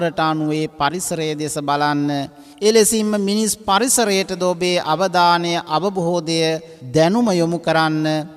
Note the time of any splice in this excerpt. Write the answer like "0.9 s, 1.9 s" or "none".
2.4 s, 6.7 s